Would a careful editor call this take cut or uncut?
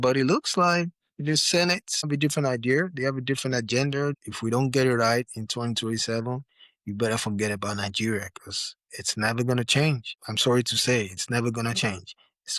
cut